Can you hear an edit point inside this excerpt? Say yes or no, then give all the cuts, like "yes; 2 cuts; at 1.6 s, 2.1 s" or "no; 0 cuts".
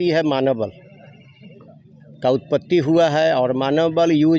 no; 0 cuts